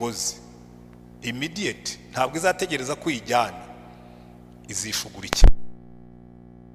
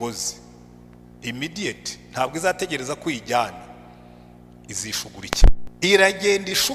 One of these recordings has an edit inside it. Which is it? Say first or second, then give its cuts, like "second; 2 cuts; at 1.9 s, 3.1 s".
second; 1 cut; at 5.7 s